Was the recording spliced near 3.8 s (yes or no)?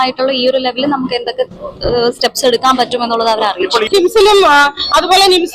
yes